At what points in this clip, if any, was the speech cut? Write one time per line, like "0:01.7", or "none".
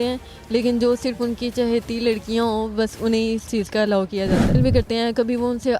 0:04.6